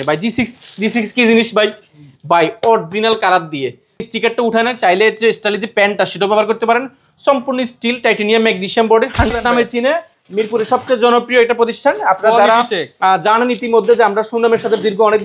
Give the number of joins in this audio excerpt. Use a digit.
2